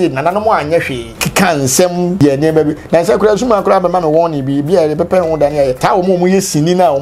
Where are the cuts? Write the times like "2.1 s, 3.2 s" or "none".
1.1 s, 2.2 s, 5.8 s